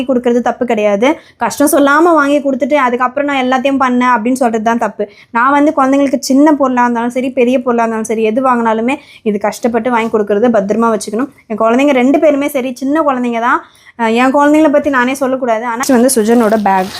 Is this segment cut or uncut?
cut